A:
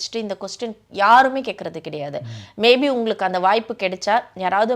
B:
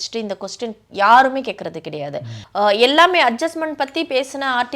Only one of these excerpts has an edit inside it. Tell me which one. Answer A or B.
B